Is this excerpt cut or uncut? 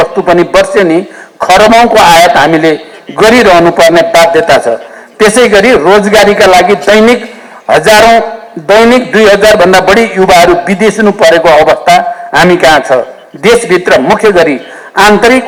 uncut